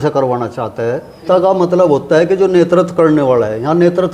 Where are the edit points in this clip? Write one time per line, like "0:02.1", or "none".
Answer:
0:01.2